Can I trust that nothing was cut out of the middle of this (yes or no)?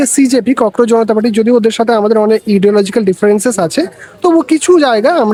yes